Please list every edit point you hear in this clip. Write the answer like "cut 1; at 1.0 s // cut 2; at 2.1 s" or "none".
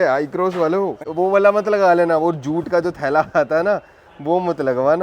cut 1; at 1.1 s